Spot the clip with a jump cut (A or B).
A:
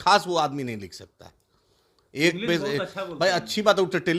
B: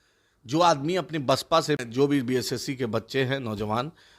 B